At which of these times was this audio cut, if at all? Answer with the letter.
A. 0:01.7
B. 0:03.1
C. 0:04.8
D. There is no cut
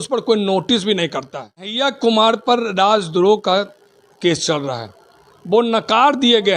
A